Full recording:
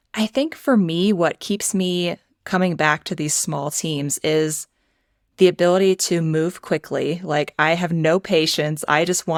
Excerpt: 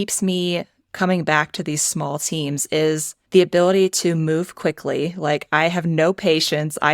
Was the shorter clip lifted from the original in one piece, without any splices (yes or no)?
no